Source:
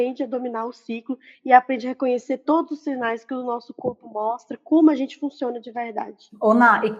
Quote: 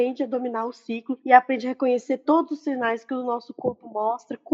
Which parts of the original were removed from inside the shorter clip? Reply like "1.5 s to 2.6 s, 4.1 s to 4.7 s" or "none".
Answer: 1.1 s to 1.3 s